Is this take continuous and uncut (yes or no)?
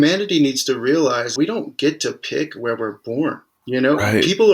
no